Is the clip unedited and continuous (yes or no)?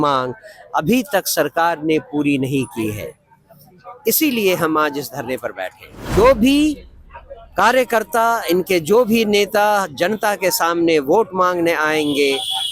no